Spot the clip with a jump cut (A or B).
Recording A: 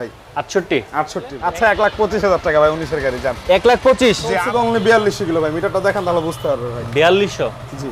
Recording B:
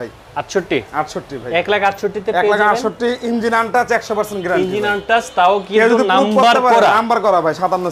A